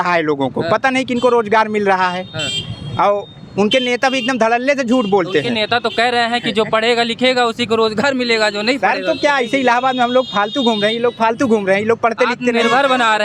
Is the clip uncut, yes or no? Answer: yes